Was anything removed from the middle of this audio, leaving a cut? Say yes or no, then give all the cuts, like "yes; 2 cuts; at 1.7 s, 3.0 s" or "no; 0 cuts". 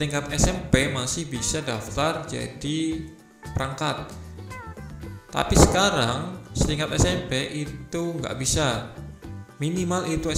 no; 0 cuts